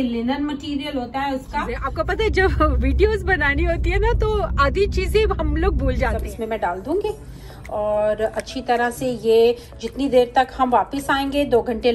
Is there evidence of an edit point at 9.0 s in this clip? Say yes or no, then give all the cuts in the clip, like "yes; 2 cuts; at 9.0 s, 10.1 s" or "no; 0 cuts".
no; 2 cuts; at 1.8 s, 6.2 s